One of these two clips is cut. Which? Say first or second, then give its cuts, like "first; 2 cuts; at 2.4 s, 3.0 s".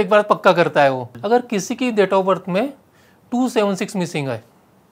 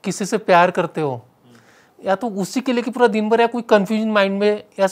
first; 1 cut; at 1.1 s